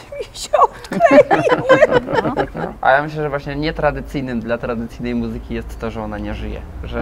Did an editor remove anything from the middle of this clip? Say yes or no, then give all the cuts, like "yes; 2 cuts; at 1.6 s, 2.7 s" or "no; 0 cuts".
yes; 1 cut; at 2.5 s